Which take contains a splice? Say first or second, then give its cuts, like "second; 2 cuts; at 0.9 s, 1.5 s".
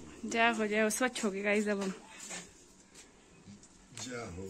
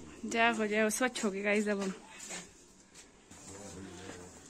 second; 1 cut; at 3.3 s